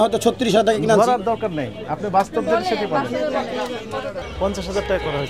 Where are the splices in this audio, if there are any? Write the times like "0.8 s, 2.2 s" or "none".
4.3 s